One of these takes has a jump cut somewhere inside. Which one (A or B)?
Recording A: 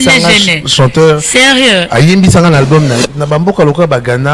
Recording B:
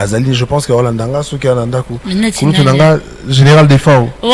A